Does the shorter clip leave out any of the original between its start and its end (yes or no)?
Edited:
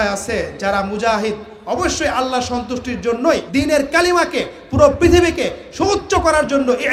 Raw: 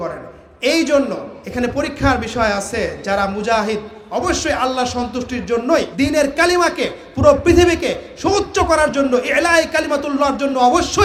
no